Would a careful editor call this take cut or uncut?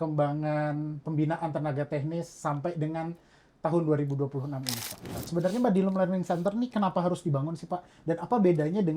cut